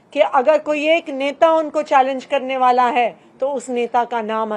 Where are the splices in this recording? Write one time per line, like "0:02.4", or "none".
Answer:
none